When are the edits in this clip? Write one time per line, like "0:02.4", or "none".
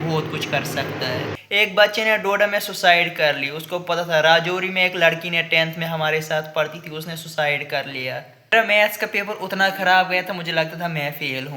0:01.3
0:08.3